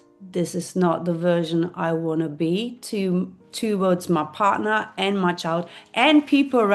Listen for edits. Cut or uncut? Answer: uncut